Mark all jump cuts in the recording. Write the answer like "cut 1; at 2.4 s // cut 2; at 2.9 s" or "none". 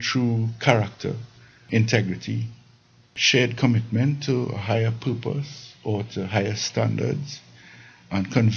cut 1; at 1.7 s // cut 2; at 3.2 s